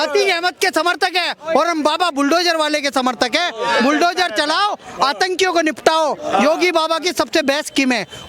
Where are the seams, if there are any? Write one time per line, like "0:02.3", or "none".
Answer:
none